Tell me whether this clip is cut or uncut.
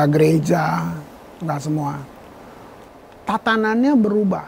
cut